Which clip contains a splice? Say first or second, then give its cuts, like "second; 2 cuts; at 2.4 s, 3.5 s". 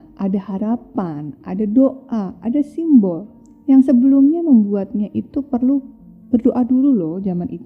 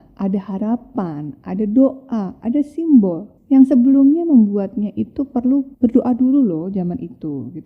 second; 2 cuts; at 3.3 s, 5.7 s